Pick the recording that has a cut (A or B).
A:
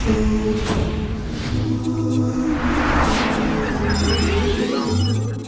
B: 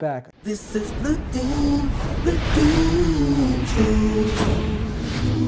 B